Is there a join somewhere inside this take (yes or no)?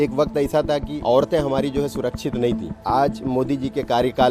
yes